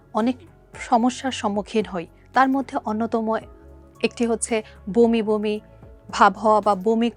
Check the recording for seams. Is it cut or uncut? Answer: uncut